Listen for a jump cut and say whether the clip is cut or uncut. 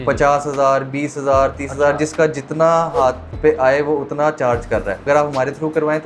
cut